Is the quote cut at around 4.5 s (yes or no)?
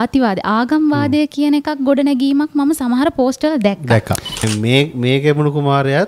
yes